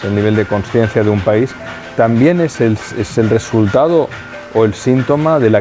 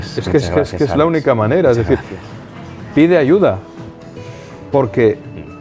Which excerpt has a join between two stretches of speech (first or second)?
second